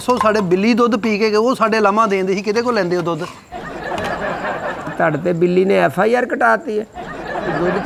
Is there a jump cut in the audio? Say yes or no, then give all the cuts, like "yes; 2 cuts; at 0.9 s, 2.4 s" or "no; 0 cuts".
no; 0 cuts